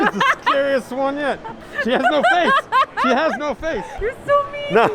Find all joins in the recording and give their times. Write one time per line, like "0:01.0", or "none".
0:01.5
0:03.9